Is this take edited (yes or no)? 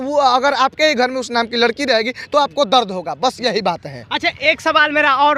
no